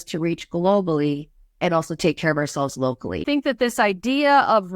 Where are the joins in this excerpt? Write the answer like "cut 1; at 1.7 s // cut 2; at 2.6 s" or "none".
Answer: cut 1; at 1.6 s // cut 2; at 3.2 s

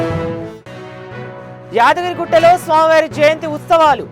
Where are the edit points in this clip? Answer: cut 1; at 1.6 s

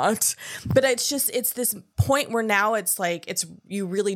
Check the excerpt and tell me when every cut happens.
cut 1; at 1.9 s

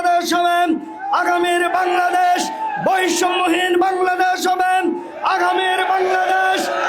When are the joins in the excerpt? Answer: none

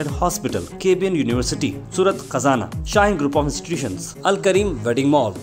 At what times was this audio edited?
none

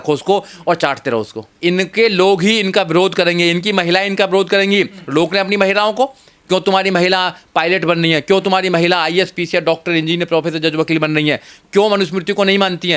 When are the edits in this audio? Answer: cut 1; at 1.6 s

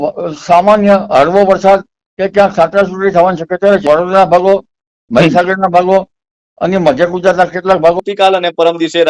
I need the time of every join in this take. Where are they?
cut 1; at 3.8 s // cut 2; at 8.0 s

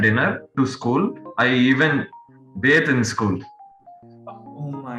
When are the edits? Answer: none

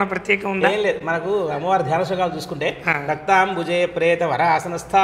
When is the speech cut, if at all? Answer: none

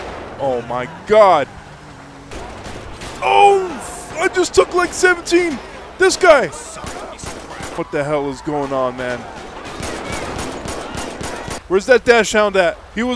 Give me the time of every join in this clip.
cut 1; at 7.7 s // cut 2; at 11.6 s

